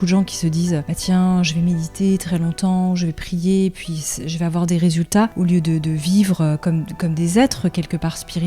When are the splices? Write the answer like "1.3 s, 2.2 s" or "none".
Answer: 0.9 s, 5.3 s